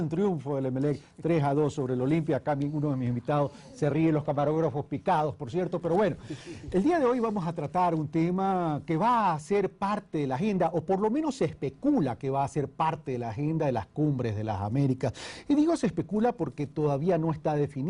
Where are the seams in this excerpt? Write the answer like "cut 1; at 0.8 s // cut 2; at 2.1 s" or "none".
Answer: none